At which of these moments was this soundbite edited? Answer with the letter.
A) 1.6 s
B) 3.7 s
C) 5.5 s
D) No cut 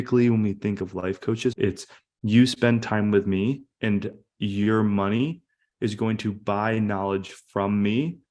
A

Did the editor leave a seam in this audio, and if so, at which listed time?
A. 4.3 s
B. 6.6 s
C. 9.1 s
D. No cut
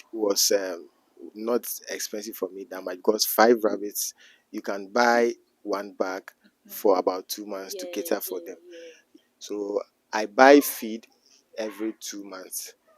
C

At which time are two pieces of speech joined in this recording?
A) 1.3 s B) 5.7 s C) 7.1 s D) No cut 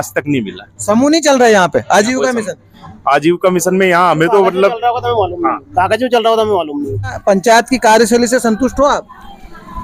C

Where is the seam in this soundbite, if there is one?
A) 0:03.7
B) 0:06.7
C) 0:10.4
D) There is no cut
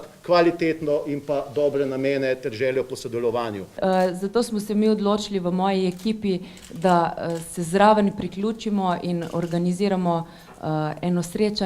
A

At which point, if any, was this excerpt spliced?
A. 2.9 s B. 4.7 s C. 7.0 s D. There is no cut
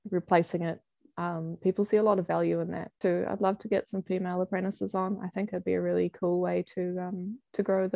A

